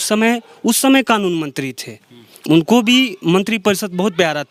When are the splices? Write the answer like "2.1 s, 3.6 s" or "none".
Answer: none